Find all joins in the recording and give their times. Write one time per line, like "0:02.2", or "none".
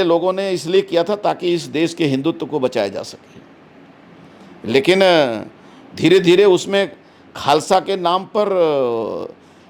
none